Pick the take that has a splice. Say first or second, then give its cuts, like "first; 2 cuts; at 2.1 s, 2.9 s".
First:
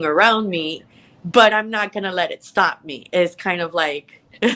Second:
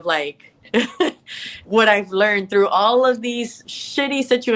second; 1 cut; at 3.5 s